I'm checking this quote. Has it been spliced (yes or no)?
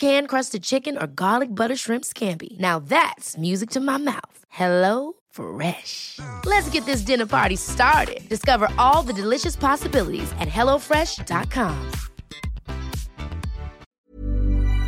yes